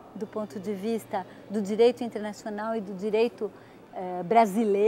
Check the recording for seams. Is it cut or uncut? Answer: cut